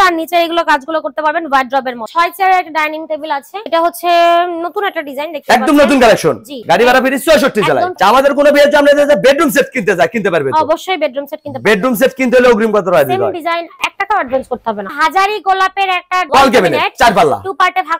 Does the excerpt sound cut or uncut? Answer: cut